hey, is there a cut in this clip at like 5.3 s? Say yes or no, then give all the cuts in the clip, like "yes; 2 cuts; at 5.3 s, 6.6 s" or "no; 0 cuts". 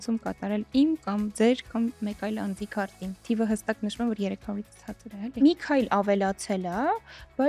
yes; 2 cuts; at 3.1 s, 5.3 s